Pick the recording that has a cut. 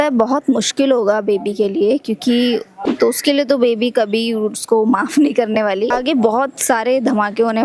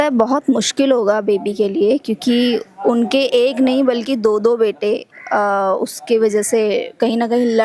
first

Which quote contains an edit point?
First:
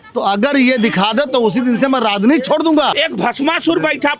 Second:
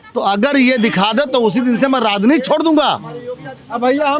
first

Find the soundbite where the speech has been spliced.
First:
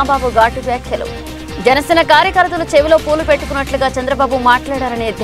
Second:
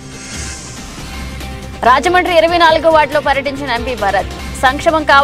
second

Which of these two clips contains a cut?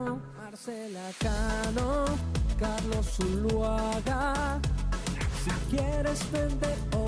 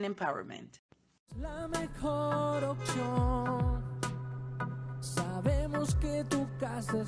second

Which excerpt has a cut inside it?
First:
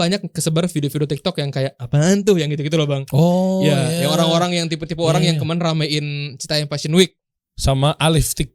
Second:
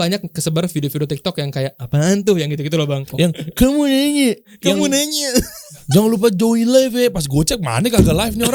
second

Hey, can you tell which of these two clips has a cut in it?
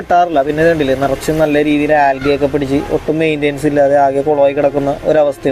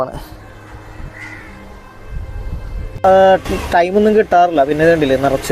second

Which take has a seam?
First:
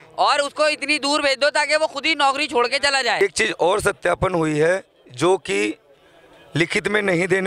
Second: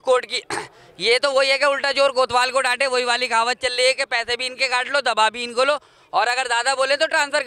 first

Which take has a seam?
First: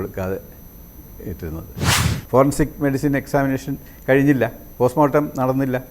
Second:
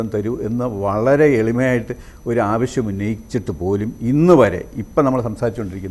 first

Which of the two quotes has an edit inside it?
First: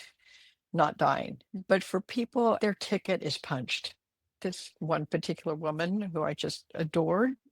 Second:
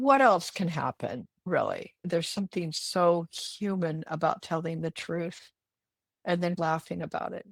first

